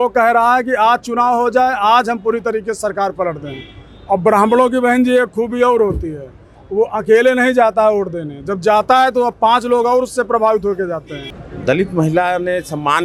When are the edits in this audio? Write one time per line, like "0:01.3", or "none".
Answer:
none